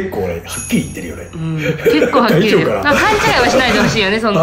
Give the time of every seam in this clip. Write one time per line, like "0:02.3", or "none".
none

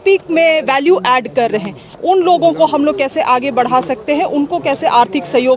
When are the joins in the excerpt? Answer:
none

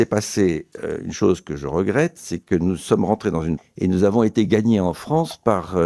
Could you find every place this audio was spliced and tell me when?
0:03.6

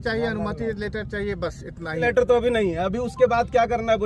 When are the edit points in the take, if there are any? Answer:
0:02.0

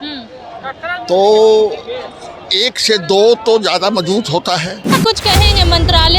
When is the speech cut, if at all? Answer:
0:04.8

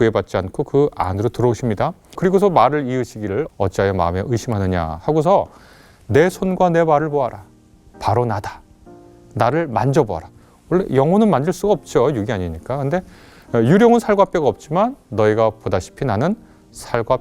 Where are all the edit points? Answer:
0:02.2
0:03.5

